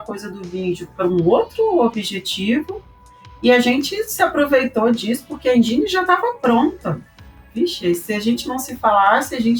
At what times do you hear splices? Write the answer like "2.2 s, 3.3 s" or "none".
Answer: none